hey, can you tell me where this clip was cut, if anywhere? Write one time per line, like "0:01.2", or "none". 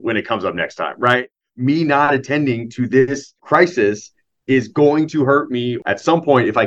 0:01.3
0:03.4
0:05.7